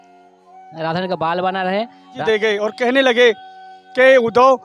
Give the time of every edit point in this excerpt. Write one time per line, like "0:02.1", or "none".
0:02.2